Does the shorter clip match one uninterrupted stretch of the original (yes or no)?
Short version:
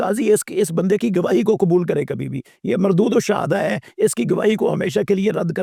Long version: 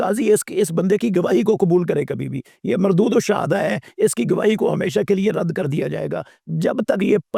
yes